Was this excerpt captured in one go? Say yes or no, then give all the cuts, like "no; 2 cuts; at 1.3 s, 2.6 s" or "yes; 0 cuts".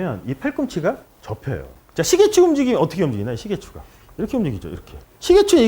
no; 1 cut; at 1.7 s